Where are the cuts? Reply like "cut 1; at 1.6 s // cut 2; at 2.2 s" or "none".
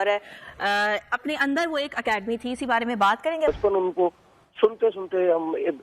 cut 1; at 3.5 s